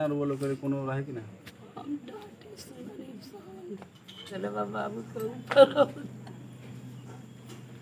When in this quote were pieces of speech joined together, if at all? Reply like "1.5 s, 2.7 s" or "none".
4.4 s